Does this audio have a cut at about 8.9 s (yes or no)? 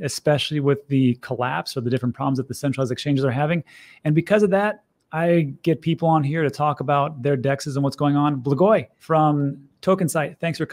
yes